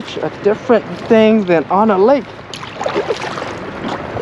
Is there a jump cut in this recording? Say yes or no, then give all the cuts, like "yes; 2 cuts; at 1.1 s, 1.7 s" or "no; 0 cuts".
yes; 1 cut; at 0.9 s